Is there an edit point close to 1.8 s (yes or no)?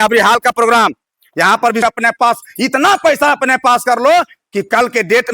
yes